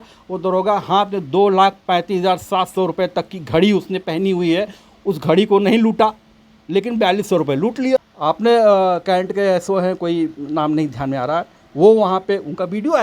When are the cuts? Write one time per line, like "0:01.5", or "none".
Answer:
0:08.1